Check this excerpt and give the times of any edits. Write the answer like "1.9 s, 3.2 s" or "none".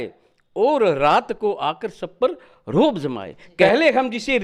3.4 s